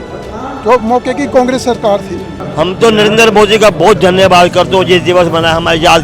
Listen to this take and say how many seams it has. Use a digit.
1